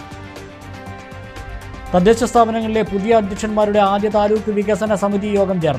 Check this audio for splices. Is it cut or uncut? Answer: uncut